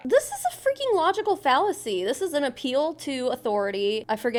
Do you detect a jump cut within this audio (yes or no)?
no